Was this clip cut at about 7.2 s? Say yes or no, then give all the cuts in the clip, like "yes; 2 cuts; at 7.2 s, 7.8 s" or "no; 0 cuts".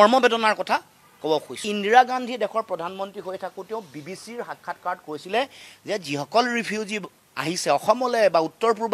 no; 1 cut; at 1.7 s